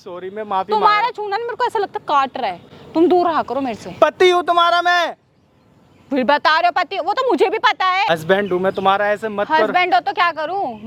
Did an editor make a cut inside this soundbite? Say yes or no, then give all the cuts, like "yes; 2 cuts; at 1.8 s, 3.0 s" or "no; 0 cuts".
no; 0 cuts